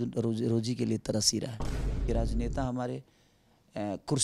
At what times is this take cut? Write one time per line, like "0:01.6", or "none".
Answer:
0:02.0